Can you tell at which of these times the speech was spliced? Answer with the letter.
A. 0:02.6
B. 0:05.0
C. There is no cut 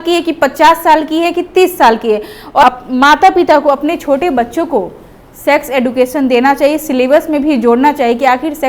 A